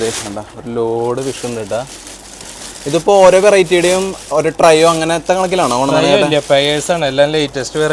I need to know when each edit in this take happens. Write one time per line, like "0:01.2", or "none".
none